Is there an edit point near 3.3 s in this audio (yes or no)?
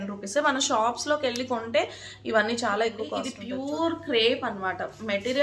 yes